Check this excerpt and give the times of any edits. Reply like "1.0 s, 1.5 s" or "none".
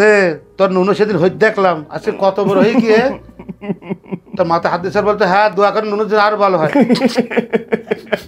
none